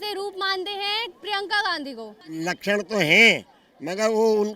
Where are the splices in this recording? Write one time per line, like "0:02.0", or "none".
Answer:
0:02.2